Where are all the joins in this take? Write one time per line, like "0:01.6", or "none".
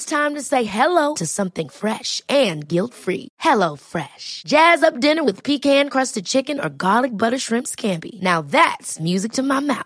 none